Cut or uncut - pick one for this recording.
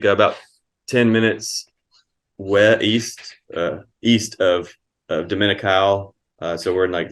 uncut